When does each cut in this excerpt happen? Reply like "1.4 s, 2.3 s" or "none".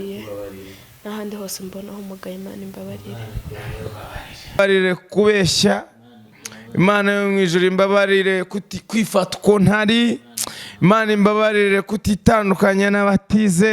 4.6 s